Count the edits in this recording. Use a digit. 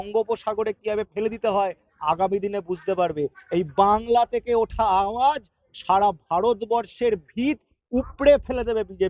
0